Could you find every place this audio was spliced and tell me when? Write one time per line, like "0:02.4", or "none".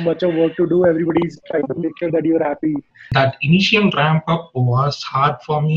0:02.9